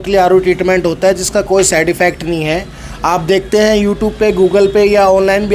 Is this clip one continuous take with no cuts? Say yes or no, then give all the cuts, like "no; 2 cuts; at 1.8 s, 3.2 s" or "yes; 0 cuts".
yes; 0 cuts